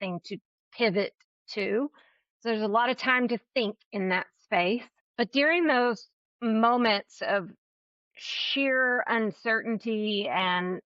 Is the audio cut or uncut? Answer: cut